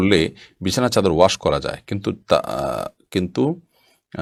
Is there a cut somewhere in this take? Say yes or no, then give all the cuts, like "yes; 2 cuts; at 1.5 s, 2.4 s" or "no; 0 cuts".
no; 0 cuts